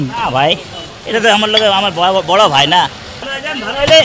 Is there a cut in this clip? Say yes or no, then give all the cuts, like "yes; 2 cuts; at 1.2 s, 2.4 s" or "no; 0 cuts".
yes; 1 cut; at 3.0 s